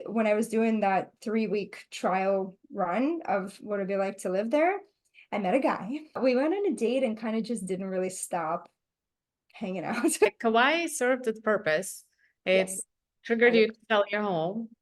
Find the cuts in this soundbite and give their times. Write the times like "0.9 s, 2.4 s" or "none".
6.2 s, 10.3 s

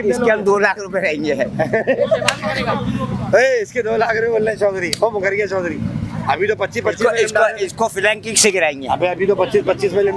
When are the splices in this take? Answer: none

